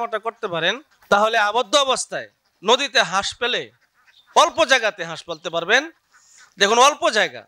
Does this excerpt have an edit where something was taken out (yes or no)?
yes